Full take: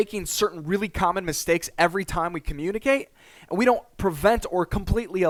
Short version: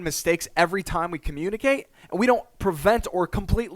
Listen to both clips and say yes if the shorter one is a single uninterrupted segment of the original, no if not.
no